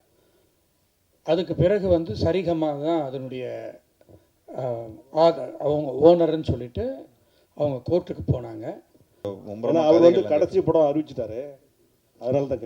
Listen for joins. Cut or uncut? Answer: cut